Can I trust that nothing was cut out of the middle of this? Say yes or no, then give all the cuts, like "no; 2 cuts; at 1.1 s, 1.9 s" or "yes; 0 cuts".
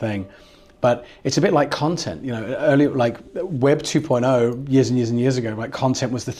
yes; 0 cuts